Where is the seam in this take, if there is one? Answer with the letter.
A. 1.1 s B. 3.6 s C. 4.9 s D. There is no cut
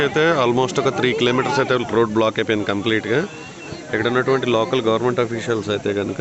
B